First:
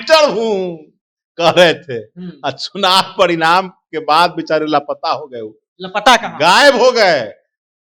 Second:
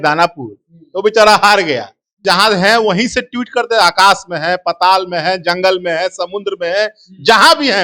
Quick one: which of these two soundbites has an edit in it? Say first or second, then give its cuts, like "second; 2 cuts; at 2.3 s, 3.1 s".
second; 1 cut; at 2.2 s